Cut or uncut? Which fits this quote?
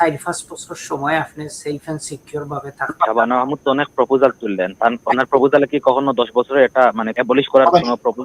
cut